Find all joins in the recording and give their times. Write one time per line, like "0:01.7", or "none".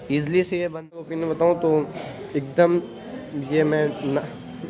0:01.1